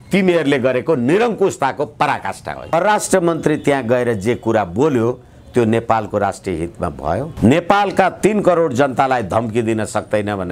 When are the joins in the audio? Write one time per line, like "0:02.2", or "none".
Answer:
0:02.7
0:07.3